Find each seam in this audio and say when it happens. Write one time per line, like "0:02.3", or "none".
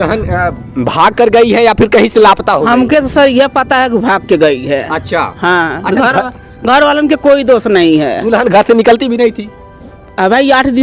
none